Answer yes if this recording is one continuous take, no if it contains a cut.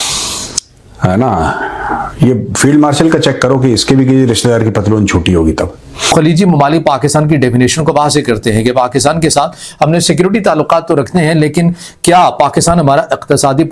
no